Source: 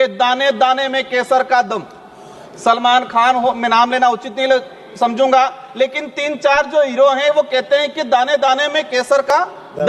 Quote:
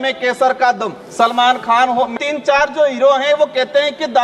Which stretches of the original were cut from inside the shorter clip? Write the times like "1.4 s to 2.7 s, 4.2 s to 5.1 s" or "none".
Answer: 1.9 s to 2.4 s, 3.6 s to 6.1 s